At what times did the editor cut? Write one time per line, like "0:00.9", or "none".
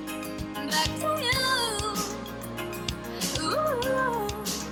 none